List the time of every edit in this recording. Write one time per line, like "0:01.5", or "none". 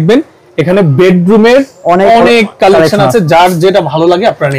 none